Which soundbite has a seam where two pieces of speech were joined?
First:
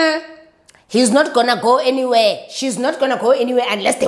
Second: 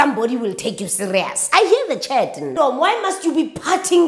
second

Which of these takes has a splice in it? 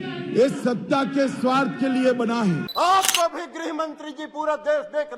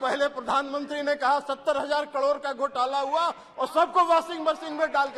first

